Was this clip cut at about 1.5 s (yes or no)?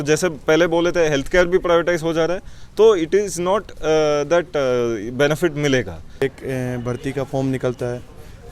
no